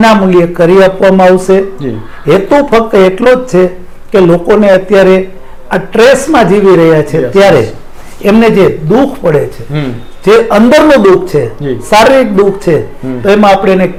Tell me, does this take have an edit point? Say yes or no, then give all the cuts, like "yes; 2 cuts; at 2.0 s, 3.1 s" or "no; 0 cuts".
no; 0 cuts